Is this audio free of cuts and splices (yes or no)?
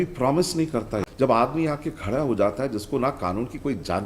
no